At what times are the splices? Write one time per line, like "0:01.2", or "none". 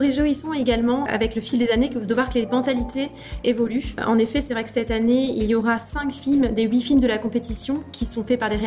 0:01.1
0:04.0